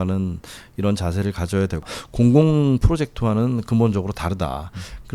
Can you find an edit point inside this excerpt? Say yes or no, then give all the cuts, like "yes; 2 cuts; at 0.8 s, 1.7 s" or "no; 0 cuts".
yes; 1 cut; at 1.8 s